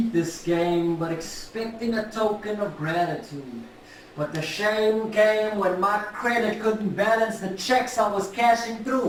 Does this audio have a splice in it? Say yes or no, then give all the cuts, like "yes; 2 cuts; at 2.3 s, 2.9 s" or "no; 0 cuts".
no; 0 cuts